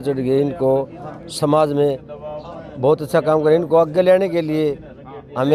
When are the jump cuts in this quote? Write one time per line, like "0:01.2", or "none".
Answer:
none